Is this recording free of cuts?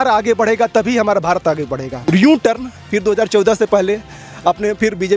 no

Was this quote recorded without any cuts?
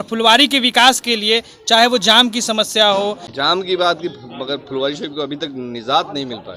no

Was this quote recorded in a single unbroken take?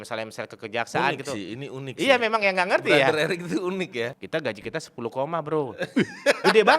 no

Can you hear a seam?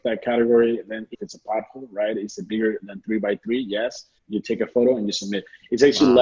yes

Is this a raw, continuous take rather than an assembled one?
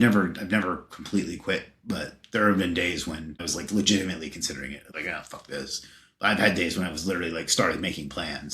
no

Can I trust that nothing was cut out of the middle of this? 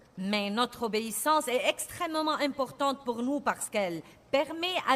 no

